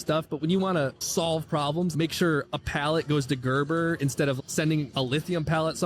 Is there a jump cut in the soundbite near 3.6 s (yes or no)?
no